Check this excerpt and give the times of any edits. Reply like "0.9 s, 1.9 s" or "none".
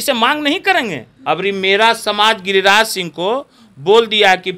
1.1 s

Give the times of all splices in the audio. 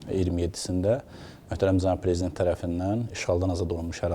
none

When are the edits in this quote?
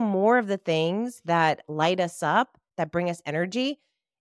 2.6 s

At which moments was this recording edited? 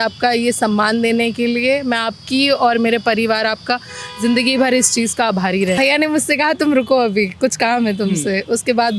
5.8 s

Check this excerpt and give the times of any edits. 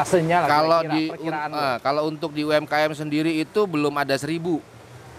none

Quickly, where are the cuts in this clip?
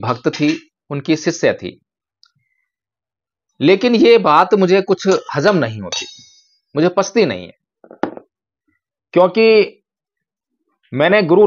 none

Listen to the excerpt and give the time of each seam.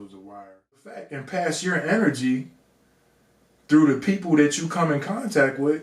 1.2 s

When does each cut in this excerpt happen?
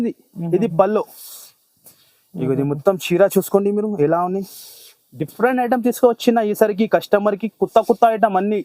none

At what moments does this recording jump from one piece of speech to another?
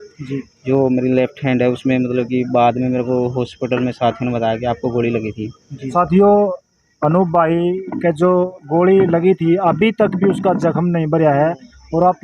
5.9 s

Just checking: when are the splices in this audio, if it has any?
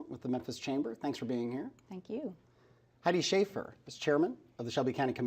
3.3 s

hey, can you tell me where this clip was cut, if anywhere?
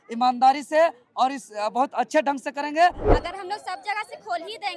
3.0 s

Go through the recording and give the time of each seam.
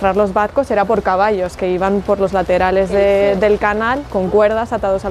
none

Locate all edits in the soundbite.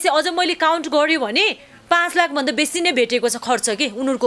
none

